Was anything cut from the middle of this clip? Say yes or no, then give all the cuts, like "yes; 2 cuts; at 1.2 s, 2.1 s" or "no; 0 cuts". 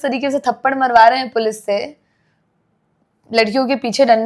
no; 0 cuts